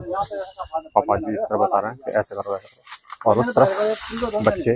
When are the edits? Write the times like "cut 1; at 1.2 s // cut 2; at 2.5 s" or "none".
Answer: none

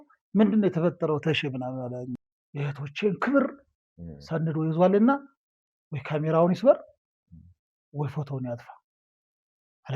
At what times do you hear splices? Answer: cut 1; at 2.2 s

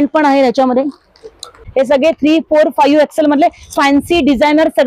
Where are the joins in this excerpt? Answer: cut 1; at 1.6 s

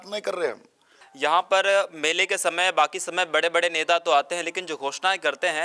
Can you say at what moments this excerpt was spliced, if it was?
cut 1; at 1.0 s

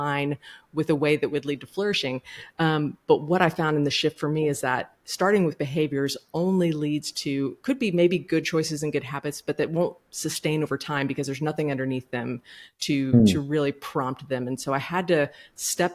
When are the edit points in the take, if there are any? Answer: none

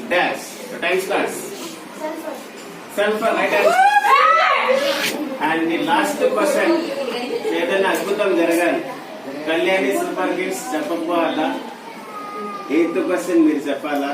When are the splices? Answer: cut 1; at 1.6 s // cut 2; at 5.1 s

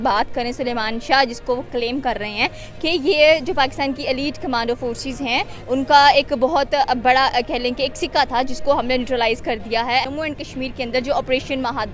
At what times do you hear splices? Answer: cut 1; at 10.1 s

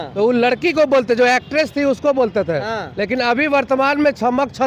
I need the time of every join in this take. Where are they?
none

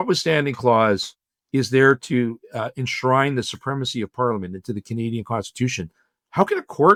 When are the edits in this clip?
none

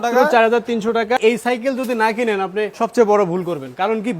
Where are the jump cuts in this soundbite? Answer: cut 1; at 1.2 s // cut 2; at 2.7 s

